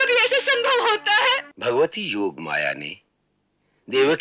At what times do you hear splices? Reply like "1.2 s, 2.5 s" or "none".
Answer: 1.5 s